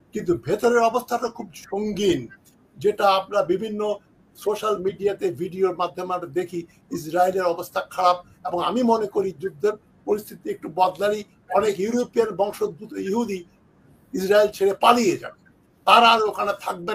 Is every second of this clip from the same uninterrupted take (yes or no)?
yes